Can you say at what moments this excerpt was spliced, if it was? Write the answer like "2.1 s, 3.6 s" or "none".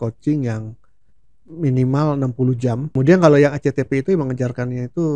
2.9 s